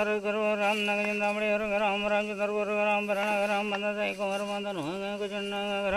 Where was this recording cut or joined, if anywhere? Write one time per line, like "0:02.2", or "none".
none